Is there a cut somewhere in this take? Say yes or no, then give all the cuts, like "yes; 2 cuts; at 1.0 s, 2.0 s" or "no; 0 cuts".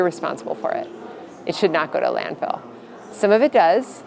no; 0 cuts